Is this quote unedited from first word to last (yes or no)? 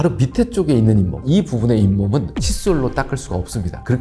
no